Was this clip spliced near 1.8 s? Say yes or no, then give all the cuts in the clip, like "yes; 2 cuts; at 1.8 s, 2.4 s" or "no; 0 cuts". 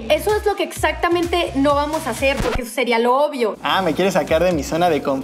no; 0 cuts